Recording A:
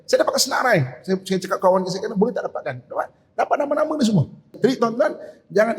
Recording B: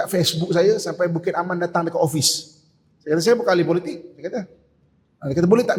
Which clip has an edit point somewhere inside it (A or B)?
A